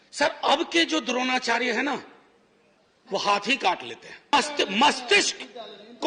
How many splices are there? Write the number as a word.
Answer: one